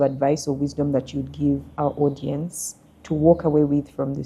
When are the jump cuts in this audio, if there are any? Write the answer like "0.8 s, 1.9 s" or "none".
none

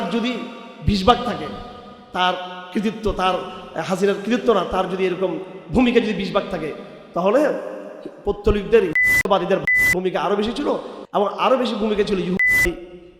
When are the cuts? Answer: none

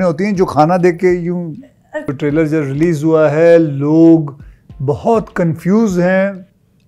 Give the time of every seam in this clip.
2.2 s

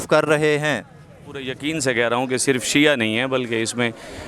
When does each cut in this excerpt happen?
1.5 s

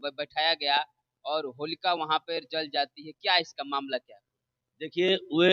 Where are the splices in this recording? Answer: none

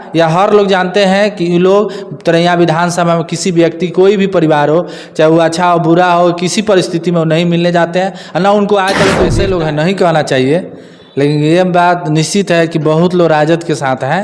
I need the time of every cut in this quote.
9.4 s

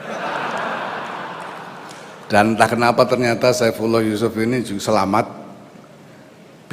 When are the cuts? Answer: 2.2 s

